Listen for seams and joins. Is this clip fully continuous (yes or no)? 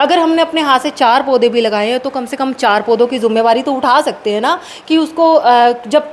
yes